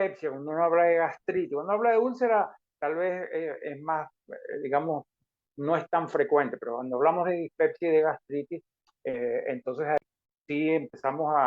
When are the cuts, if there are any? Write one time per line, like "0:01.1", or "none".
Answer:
0:10.0